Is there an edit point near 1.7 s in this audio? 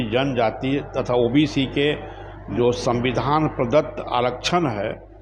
no; 0 cuts

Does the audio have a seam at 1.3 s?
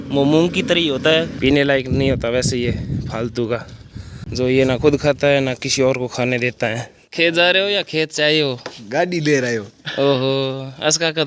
yes; 3 cuts; at 1.3 s, 4.2 s, 6.9 s

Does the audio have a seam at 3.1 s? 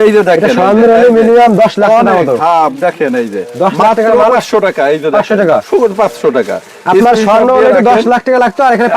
no; 0 cuts

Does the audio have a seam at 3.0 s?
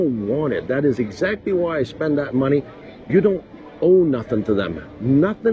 yes; 1 cut; at 3.0 s

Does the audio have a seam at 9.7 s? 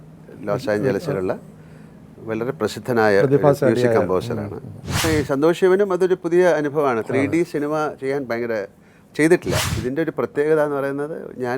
yes; 2 cuts; at 5.1 s, 9.7 s

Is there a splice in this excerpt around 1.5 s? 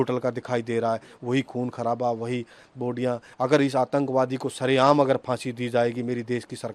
no; 1 cut; at 3.3 s

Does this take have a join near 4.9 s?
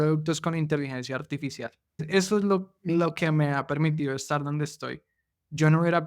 no; 1 cut; at 2.0 s

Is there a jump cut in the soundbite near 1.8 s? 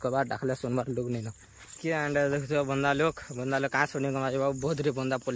yes; 1 cut; at 1.8 s

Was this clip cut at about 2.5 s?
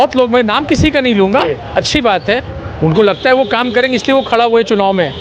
yes; 1 cut; at 2.5 s

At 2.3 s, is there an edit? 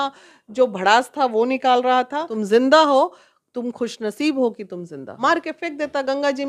yes; 2 cuts; at 2.3 s, 5.0 s

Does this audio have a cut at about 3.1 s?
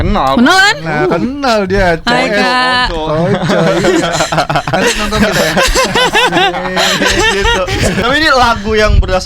no; 1 cut; at 8.0 s

